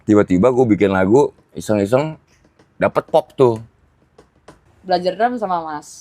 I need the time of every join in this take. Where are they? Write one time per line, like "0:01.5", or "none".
0:04.7